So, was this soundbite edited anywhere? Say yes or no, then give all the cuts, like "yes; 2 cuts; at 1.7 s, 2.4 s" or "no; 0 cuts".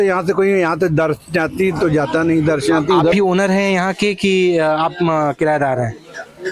yes; 1 cut; at 3.1 s